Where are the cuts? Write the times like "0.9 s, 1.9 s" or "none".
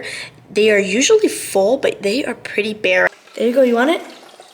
3.1 s